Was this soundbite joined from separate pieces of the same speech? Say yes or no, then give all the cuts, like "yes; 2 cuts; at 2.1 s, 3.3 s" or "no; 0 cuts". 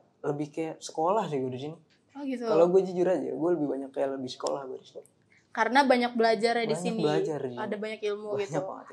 no; 0 cuts